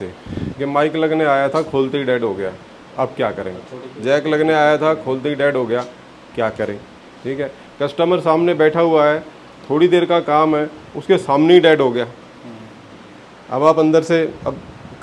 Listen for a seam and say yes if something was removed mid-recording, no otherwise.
no